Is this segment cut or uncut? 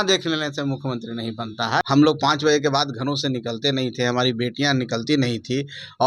cut